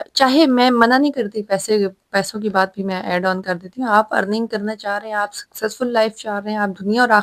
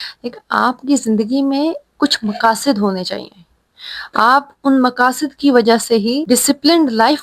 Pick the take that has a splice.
second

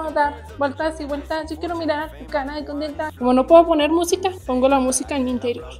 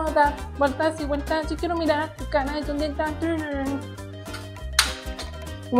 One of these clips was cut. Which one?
first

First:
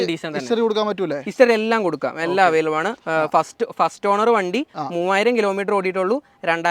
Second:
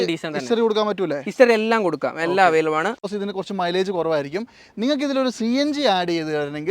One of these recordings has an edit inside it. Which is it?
second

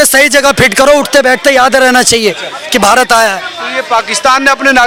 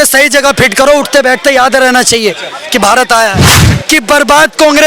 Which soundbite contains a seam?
second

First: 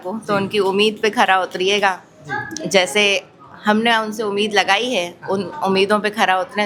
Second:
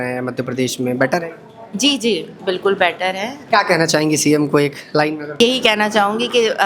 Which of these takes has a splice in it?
second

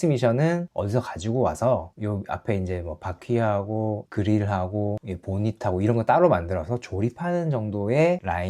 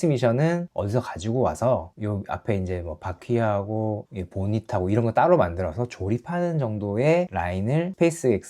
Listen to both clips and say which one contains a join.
second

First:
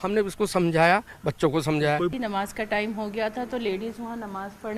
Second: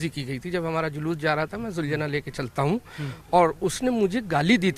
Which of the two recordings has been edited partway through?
first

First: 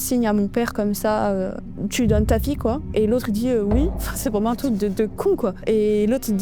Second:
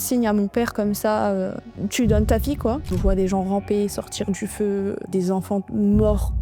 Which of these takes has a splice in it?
second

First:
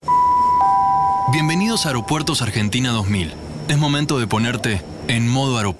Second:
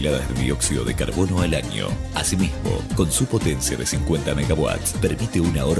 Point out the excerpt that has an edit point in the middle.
first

